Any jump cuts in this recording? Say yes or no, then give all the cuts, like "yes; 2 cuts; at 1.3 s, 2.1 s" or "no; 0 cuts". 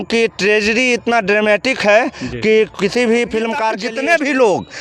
yes; 1 cut; at 3.8 s